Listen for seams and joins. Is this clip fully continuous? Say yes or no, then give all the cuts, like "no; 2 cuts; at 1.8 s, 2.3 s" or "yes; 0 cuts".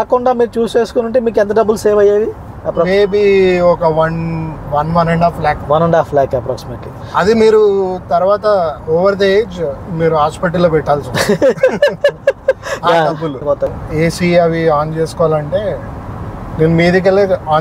no; 1 cut; at 13.7 s